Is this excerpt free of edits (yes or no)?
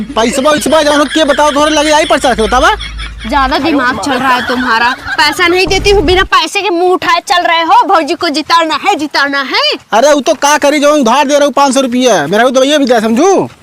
yes